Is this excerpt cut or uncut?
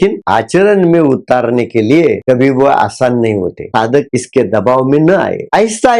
cut